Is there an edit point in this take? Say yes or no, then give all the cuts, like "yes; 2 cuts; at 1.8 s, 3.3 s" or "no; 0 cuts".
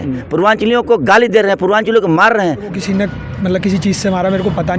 yes; 1 cut; at 2.7 s